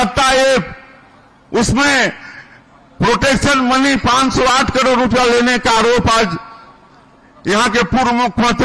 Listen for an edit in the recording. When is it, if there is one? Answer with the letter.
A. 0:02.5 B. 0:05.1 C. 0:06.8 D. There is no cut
D